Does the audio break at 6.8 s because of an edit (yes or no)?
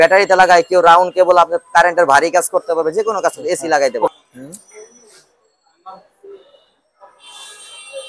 no